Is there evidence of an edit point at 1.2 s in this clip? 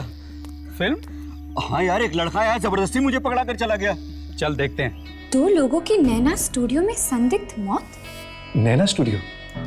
no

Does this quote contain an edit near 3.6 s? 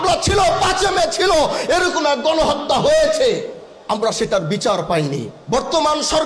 no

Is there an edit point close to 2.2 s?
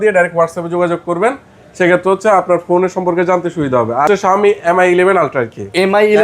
no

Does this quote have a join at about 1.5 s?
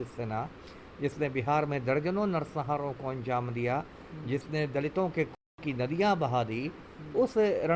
no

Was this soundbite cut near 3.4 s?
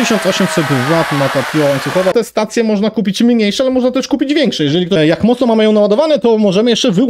no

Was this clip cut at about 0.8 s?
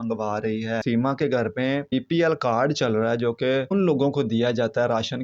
yes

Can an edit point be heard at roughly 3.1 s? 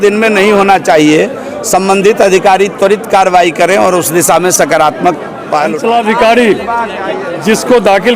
no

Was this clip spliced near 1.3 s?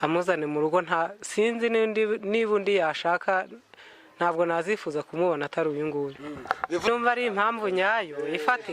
no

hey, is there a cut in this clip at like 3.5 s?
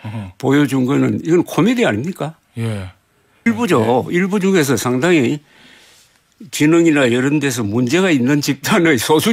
yes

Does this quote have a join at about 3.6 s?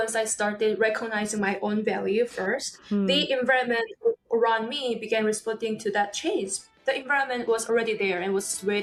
no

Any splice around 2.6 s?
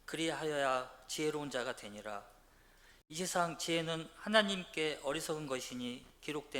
yes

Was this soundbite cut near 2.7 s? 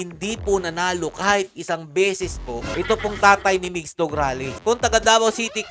yes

